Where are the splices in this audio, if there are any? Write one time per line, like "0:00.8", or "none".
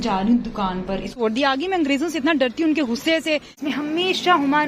0:01.2
0:03.6